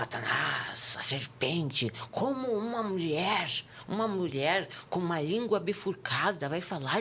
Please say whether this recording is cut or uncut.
uncut